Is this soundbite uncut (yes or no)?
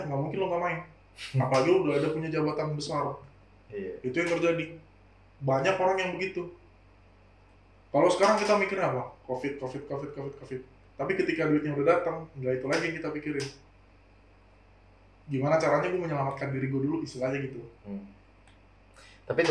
yes